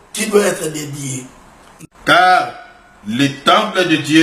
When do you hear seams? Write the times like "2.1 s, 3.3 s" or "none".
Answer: 1.7 s

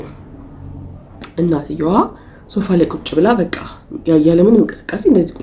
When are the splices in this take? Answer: none

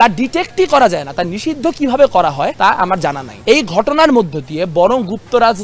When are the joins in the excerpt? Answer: 2.8 s

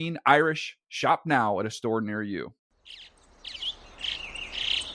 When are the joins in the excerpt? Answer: 2.6 s

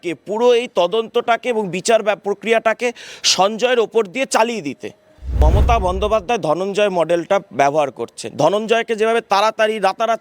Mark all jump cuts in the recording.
5.4 s

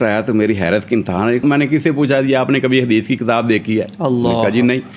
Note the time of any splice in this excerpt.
1.4 s

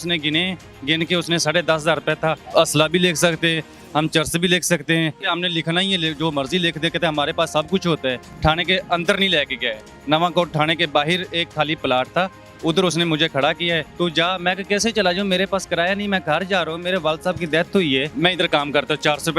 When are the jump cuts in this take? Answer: 2.4 s, 5.3 s, 8.3 s, 13.9 s, 18.1 s

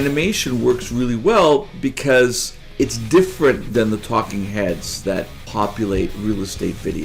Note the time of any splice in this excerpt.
2.6 s, 3.6 s, 5.4 s

